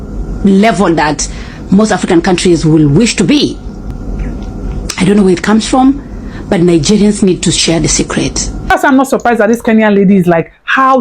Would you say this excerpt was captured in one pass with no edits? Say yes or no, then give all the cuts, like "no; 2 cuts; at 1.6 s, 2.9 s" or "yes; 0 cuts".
no; 2 cuts; at 3.9 s, 8.7 s